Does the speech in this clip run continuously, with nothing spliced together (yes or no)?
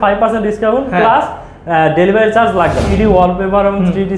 no